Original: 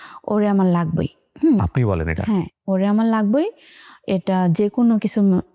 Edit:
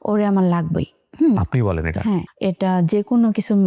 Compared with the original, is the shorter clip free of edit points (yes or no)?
no